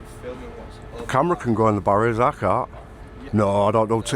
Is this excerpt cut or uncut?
cut